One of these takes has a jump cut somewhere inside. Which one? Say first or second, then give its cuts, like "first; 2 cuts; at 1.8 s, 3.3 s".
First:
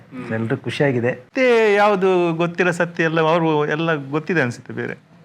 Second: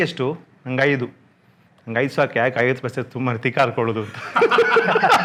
first; 1 cut; at 1.2 s